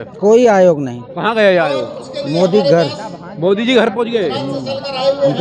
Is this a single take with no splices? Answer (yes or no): yes